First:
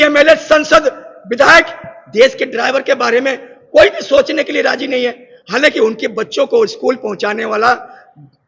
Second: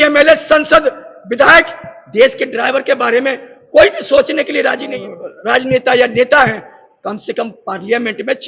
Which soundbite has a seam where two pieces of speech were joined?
second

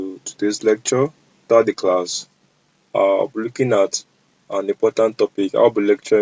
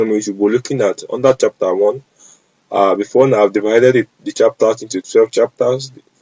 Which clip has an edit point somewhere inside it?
first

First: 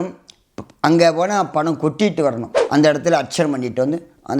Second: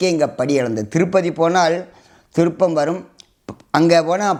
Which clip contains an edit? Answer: first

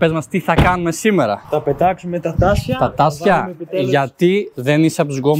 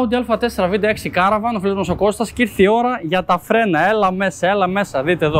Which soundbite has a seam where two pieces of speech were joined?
first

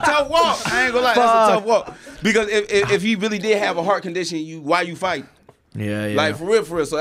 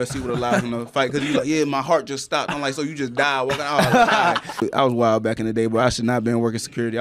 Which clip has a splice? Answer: second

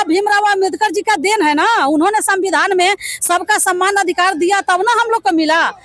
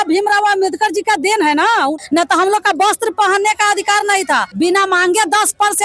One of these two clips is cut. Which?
second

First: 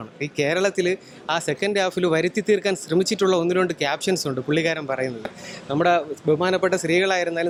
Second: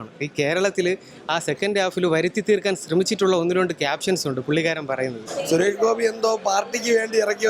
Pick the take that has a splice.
second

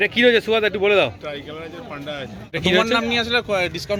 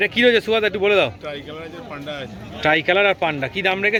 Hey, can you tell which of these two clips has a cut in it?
first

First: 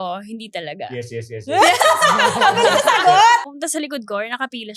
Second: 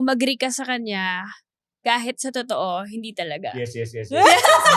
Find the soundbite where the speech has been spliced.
first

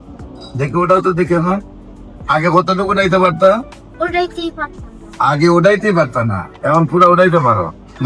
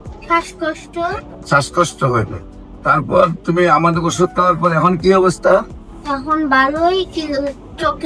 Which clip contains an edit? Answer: second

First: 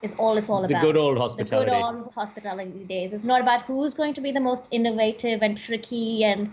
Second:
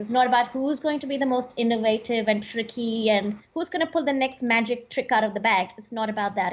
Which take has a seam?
first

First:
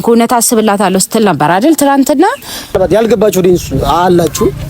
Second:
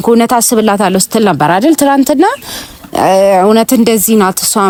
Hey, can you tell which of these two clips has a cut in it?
first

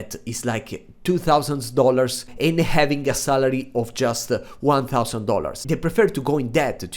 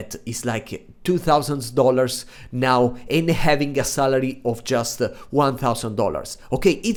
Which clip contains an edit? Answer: first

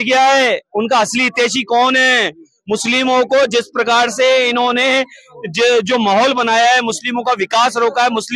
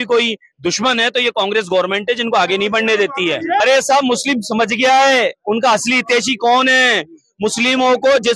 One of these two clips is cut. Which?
second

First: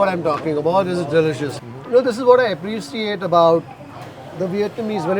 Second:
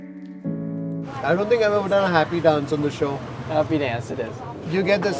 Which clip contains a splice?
first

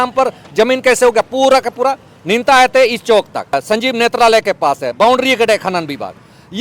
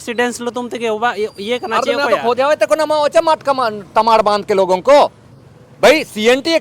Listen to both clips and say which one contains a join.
first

